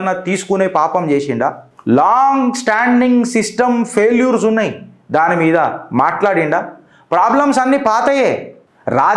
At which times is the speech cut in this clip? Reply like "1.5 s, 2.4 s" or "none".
1.7 s